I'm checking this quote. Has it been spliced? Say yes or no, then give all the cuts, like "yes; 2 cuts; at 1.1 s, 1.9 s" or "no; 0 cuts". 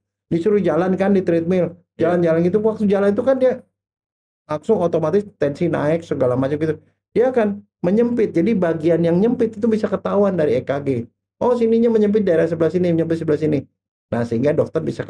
no; 0 cuts